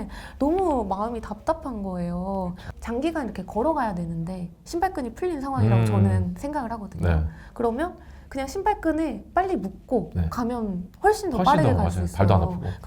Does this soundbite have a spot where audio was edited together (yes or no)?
yes